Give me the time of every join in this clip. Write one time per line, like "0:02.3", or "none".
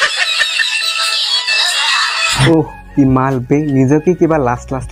0:02.3

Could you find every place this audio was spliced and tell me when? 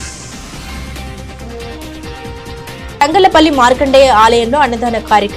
0:01.3

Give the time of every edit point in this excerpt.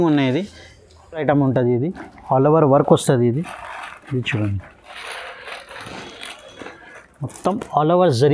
none

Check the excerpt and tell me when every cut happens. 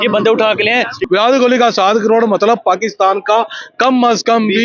0:01.0

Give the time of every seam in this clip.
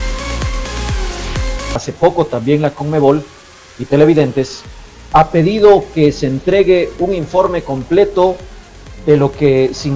0:01.7

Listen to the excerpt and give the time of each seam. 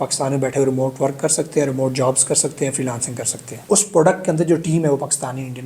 0:03.6

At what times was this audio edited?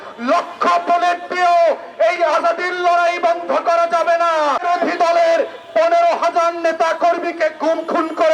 0:04.6

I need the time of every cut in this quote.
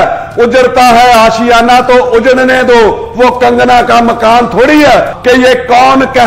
0:05.1

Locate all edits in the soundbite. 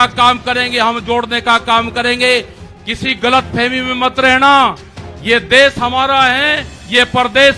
none

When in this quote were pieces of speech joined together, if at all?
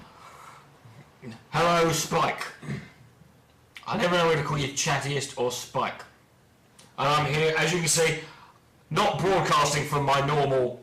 0:07.8

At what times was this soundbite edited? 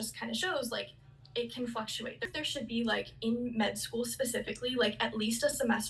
0:02.3

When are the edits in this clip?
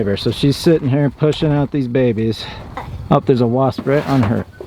0:02.9

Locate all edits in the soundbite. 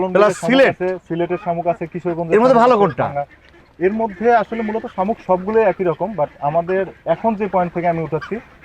none

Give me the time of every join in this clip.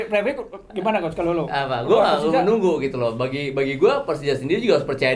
none

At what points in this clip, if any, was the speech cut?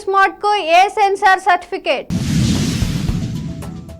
none

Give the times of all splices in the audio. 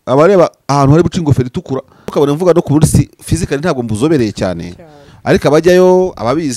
0:02.0

